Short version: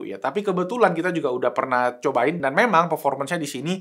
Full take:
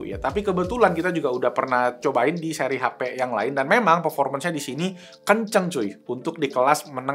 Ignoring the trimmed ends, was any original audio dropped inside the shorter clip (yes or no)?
yes